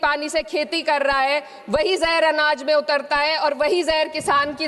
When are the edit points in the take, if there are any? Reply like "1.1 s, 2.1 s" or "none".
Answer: none